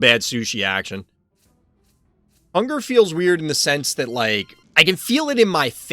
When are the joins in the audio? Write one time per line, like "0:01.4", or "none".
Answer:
0:04.6